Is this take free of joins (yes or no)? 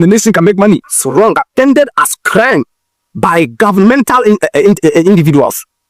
no